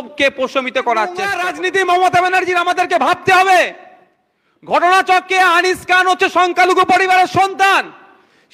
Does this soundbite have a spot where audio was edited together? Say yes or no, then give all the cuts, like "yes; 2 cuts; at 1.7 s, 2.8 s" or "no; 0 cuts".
yes; 1 cut; at 1.4 s